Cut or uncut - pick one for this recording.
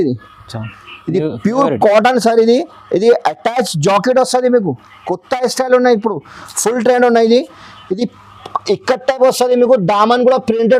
uncut